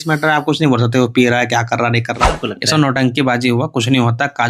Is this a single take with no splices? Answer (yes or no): no